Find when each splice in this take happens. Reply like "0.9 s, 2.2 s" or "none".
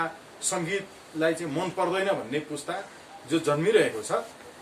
none